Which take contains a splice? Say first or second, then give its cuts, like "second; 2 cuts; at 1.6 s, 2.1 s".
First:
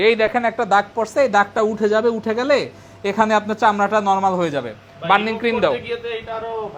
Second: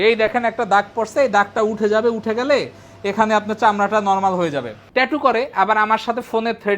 second; 1 cut; at 4.8 s